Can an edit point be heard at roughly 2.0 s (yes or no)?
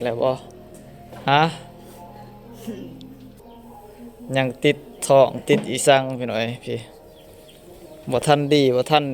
no